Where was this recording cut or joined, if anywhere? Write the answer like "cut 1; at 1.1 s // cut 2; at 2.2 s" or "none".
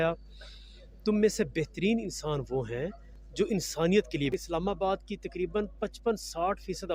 cut 1; at 4.3 s